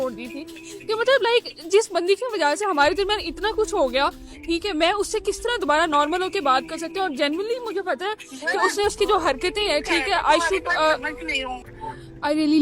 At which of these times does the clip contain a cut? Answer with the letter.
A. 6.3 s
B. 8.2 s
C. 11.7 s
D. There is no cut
C